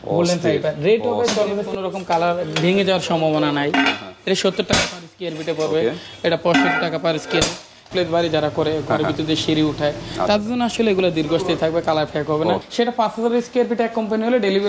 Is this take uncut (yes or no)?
no